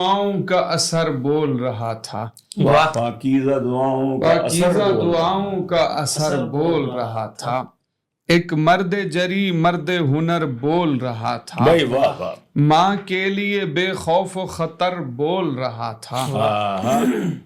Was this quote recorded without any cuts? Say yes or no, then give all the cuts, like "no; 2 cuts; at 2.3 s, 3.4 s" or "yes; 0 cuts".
yes; 0 cuts